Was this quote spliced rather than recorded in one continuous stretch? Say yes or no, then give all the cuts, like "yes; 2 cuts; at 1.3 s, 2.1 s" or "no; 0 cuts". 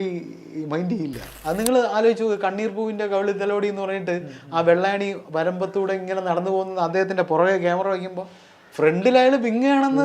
yes; 1 cut; at 1.3 s